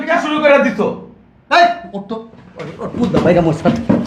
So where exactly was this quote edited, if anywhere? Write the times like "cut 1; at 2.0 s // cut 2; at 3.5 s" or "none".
none

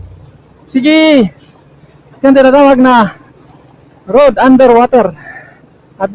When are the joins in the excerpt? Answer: none

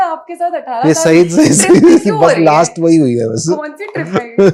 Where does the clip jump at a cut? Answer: none

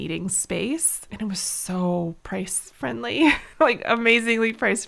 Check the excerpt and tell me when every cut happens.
cut 1; at 1.1 s // cut 2; at 2.2 s // cut 3; at 3.4 s

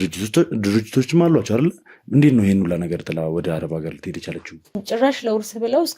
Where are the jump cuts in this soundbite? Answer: cut 1; at 4.8 s

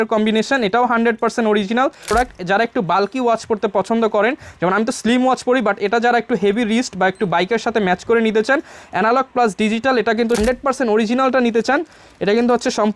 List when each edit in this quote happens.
cut 1; at 2.1 s // cut 2; at 10.4 s

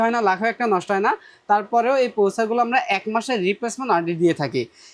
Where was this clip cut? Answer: none

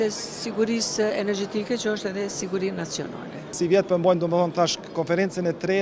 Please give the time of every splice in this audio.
cut 1; at 3.5 s

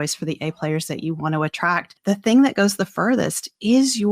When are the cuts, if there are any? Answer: cut 1; at 1.9 s

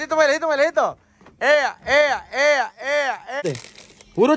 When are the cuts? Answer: cut 1; at 3.4 s

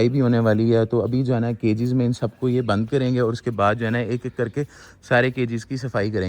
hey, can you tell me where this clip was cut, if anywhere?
none

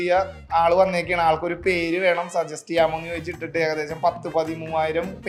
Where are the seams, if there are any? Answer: none

